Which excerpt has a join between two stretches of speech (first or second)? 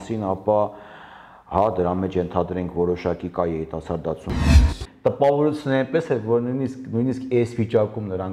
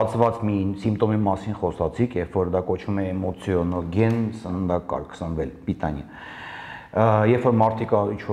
first